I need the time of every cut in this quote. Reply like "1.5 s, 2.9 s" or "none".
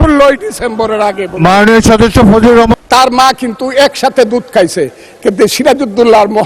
2.8 s